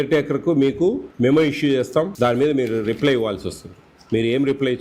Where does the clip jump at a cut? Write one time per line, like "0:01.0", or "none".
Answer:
0:01.1
0:02.1